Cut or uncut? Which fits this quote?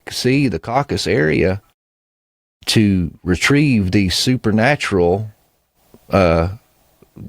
uncut